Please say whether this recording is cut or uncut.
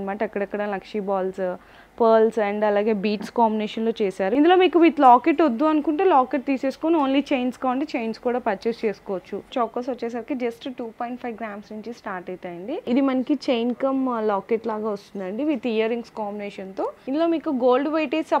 cut